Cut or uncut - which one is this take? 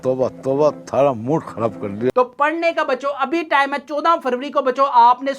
cut